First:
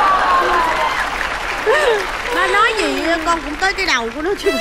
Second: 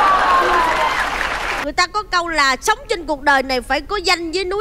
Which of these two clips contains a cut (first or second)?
second